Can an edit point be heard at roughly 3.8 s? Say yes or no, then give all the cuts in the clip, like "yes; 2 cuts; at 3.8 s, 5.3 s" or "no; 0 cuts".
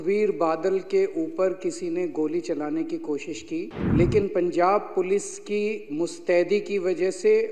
yes; 1 cut; at 3.8 s